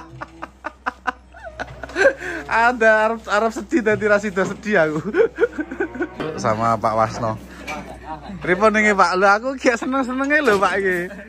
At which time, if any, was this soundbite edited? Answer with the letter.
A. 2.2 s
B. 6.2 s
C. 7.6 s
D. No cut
B